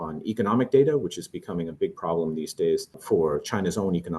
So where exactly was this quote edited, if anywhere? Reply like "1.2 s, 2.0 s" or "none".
3.0 s